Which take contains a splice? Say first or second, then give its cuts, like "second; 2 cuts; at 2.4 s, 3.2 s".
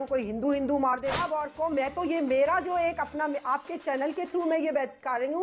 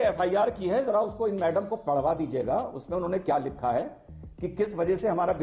first; 1 cut; at 1.1 s